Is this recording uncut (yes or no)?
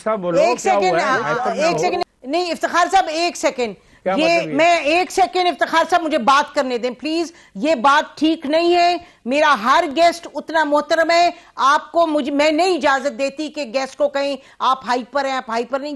no